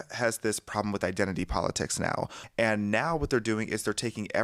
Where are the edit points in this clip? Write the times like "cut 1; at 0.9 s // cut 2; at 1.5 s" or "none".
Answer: cut 1; at 2.4 s